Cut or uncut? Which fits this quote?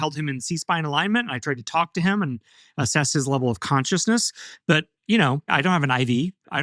uncut